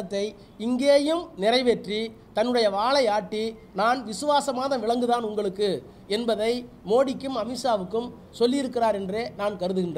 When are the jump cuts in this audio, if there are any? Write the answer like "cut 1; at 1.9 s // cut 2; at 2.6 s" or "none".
none

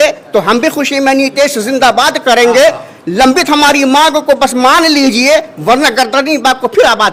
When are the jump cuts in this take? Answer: none

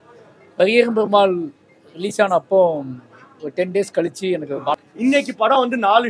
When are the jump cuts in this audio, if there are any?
cut 1; at 4.8 s

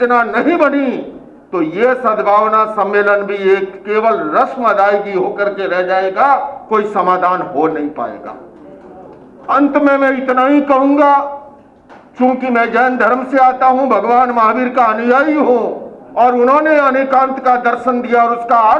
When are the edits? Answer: none

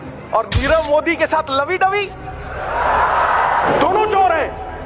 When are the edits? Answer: none

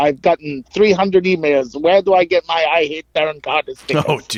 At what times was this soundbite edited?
none

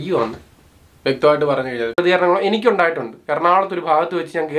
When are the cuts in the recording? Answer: cut 1; at 2.0 s

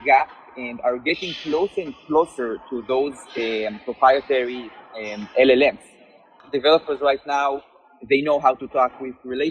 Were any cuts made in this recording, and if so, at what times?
cut 1; at 6.4 s

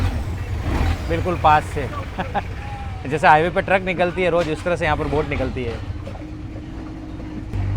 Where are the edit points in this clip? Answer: none

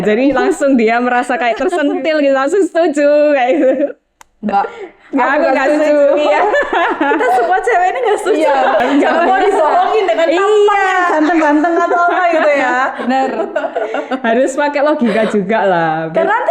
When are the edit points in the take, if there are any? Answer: cut 1; at 8.8 s

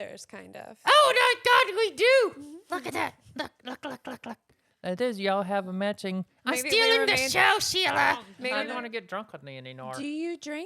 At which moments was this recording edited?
cut 1; at 8.5 s

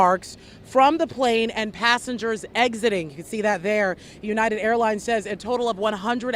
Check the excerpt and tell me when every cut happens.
cut 1; at 1.7 s

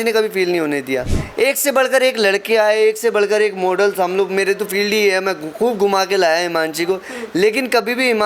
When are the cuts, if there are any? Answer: cut 1; at 1.2 s

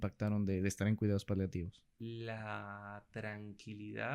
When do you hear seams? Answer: cut 1; at 1.8 s

